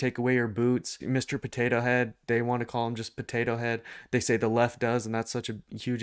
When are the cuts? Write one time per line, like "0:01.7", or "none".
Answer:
0:01.0